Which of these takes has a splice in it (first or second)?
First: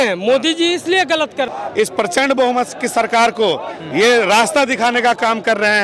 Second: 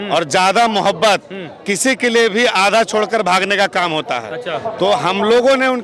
first